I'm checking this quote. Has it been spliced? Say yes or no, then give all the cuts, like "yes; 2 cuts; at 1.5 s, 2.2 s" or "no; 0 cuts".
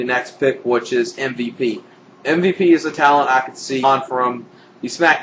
no; 0 cuts